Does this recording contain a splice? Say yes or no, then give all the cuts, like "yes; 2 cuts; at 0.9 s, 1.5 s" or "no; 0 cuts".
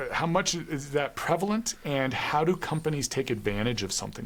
no; 0 cuts